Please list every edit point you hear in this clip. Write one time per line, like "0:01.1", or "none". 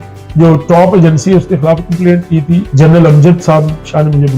0:02.7

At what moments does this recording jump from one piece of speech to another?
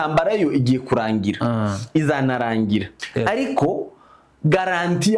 0:03.0

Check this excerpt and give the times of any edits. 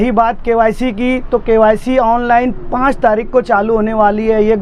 none

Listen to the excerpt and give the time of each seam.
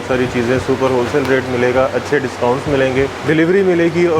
0:03.2

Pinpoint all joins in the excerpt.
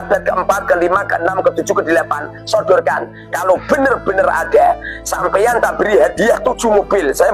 0:02.4

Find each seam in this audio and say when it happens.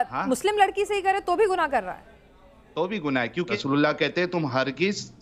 0:03.5

